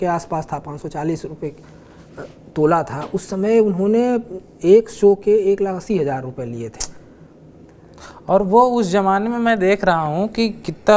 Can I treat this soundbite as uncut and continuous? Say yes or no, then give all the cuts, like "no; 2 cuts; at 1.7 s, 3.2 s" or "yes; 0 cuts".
yes; 0 cuts